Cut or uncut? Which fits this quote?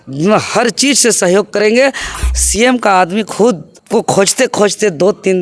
cut